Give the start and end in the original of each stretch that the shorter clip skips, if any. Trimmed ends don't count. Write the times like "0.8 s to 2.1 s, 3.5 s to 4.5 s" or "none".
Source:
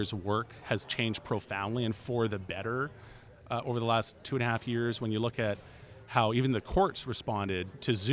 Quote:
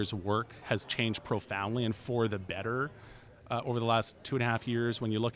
none